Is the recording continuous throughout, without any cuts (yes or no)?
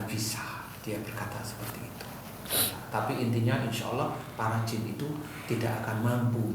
no